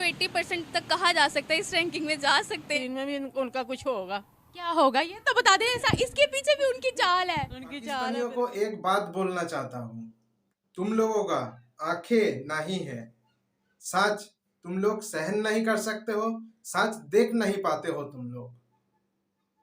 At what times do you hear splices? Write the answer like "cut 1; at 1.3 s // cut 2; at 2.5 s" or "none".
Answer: cut 1; at 2.8 s // cut 2; at 8.0 s